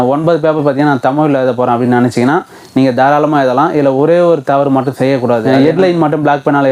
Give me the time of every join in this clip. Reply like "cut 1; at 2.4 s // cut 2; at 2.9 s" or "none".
cut 1; at 5.4 s

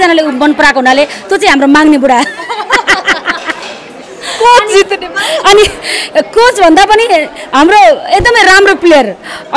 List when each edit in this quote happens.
none

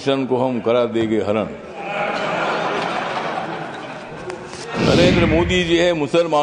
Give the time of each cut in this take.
cut 1; at 4.7 s

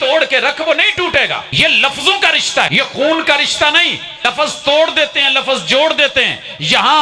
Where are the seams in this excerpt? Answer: cut 1; at 1.5 s // cut 2; at 2.7 s // cut 3; at 4.2 s

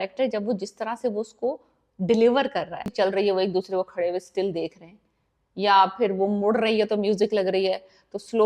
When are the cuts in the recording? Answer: cut 1; at 2.9 s

